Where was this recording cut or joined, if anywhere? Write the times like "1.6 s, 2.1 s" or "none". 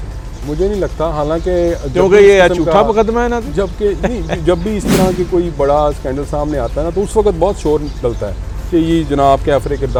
none